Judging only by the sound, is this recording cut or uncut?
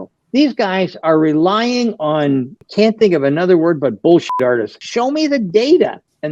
cut